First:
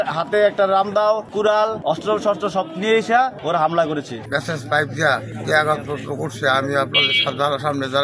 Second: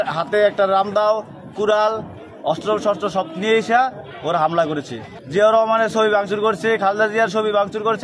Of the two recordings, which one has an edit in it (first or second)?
first